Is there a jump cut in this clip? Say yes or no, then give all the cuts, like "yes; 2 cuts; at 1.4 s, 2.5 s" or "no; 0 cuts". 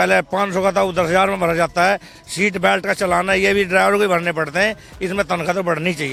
no; 0 cuts